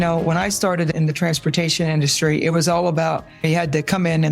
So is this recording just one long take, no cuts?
no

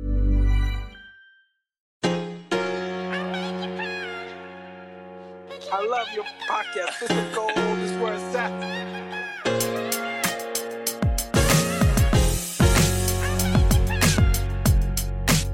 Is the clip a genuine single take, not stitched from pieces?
no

